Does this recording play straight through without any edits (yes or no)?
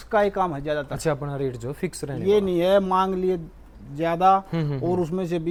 yes